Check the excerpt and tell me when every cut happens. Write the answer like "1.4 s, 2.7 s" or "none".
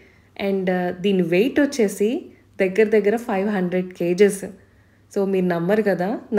none